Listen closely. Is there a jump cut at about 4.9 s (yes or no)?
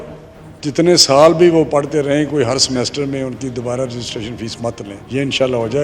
yes